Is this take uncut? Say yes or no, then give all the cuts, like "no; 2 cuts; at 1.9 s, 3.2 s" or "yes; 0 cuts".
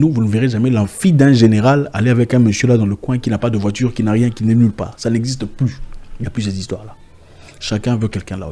yes; 0 cuts